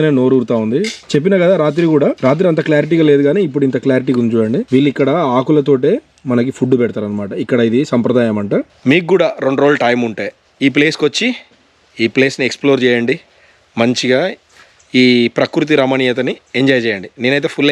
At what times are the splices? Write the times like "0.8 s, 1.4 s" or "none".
1.0 s, 2.2 s, 4.6 s, 8.7 s